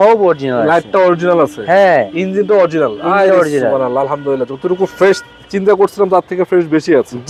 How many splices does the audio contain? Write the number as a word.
zero